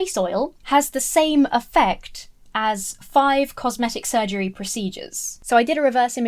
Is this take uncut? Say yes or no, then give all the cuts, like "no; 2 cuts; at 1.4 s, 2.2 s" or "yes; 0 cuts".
no; 1 cut; at 5.4 s